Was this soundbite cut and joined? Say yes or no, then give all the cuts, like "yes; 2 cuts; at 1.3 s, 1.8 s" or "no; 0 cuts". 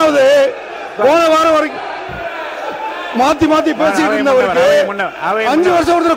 no; 0 cuts